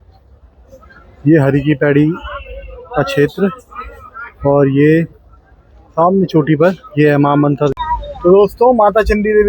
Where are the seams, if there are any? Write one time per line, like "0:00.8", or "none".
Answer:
0:07.7